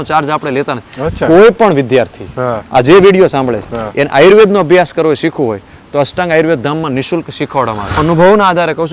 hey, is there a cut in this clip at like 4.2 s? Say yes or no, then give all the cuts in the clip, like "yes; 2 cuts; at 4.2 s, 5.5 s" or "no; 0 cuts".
no; 1 cut; at 8.0 s